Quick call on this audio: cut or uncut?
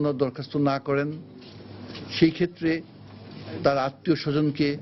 uncut